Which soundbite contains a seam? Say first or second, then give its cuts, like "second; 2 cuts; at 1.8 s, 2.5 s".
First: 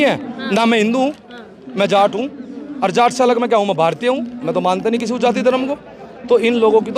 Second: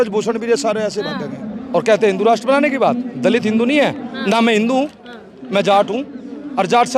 second; 1 cut; at 1.6 s